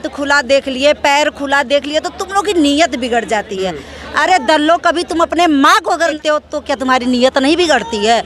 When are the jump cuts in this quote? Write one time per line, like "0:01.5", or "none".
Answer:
0:06.2